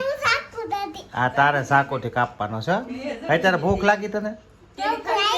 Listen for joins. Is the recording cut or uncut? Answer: uncut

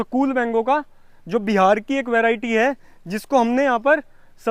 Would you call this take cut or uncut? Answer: uncut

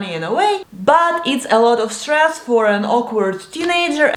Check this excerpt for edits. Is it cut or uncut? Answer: uncut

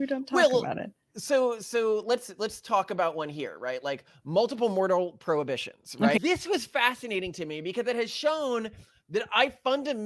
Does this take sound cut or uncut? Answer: cut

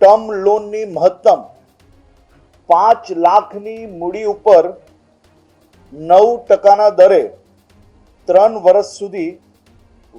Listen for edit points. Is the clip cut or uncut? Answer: uncut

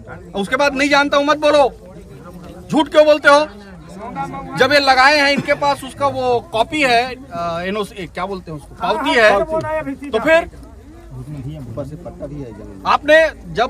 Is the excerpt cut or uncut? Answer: uncut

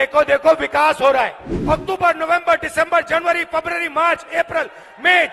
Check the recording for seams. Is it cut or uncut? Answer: cut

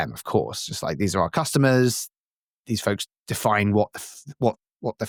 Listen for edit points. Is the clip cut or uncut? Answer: uncut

